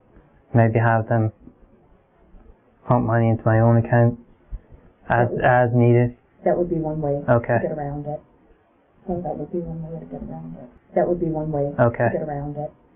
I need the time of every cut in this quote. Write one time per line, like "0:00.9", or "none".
0:10.8